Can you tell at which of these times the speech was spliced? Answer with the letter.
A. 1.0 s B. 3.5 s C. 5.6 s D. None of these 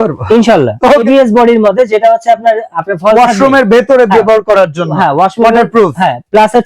A